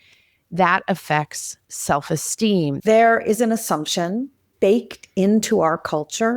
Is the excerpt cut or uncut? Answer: cut